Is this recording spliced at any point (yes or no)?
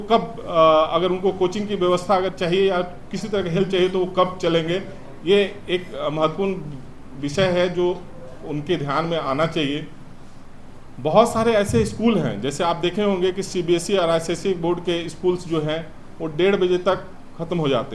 no